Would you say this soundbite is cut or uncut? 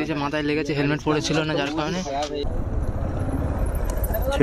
cut